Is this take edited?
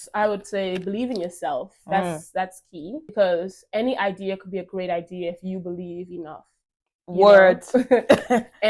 yes; 1 cut; at 3.1 s

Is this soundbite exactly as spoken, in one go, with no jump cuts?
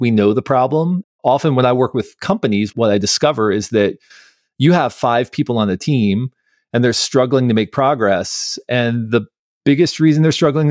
no; 1 cut; at 2.7 s

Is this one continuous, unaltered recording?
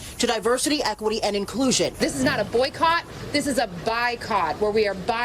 no; 1 cut; at 1.9 s

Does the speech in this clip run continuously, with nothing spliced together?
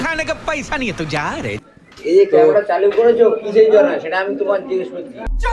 no; 1 cut; at 1.7 s

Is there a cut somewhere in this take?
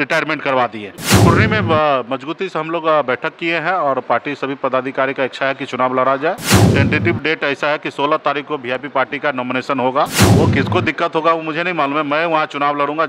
yes; 3 cuts; at 1.1 s, 6.6 s, 10.2 s

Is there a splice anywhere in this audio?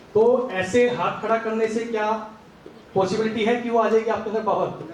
no; 0 cuts

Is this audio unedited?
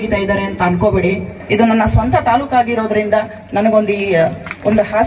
no; 1 cut; at 1.4 s

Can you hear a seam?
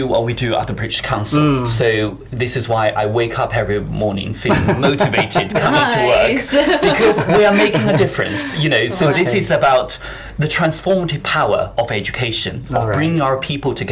no; 0 cuts

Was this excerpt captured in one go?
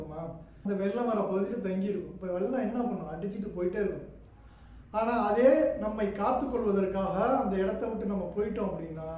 yes; 0 cuts

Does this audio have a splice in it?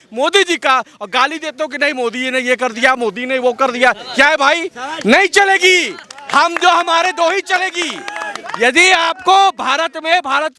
no; 0 cuts

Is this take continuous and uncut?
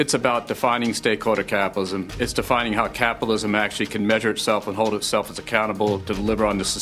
yes; 0 cuts

